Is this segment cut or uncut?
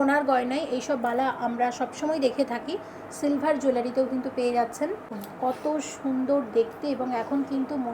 cut